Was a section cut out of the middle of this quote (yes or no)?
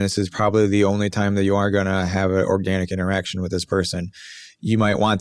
no